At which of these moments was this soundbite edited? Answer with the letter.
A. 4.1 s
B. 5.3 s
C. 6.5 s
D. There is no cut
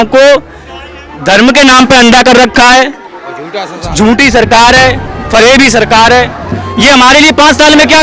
C